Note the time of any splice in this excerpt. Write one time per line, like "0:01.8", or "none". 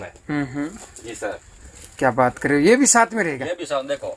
0:01.5